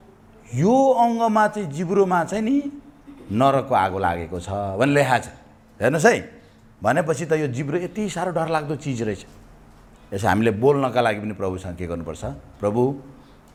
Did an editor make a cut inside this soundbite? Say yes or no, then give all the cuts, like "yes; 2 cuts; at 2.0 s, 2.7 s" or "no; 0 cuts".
no; 0 cuts